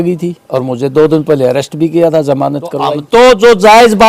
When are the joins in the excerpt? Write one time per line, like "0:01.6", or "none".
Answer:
0:03.0

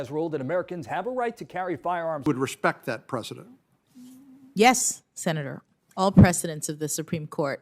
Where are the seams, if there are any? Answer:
0:02.2

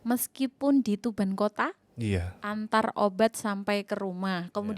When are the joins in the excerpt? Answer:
0:02.4

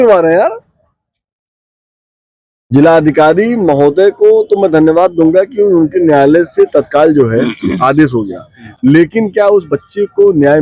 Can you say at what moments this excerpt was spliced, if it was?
none

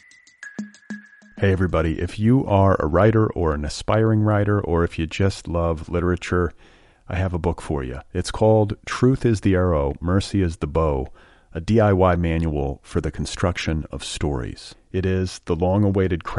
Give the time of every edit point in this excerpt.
0:00.9

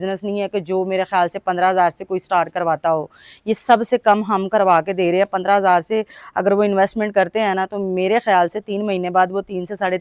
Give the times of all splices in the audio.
none

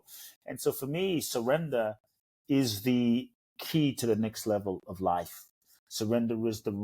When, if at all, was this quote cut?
none

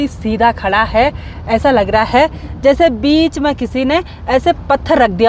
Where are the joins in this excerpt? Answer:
none

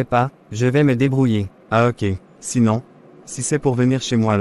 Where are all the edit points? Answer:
none

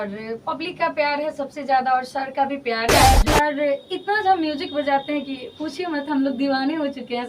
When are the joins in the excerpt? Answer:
0:03.2

